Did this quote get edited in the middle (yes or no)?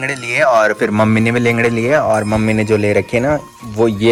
no